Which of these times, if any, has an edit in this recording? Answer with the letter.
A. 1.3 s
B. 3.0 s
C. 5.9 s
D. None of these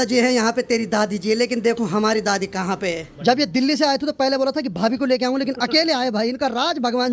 B